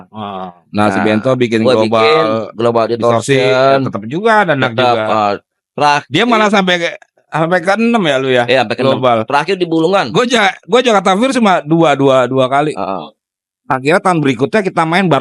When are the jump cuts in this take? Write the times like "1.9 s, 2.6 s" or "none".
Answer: 13.6 s